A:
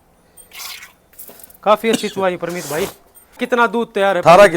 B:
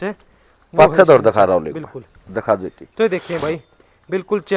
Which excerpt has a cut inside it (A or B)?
A